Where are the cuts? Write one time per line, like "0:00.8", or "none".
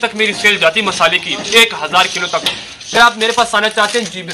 0:02.9